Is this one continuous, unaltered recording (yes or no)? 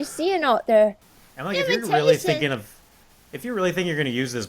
no